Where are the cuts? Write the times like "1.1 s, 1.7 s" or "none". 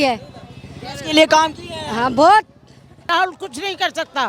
3.1 s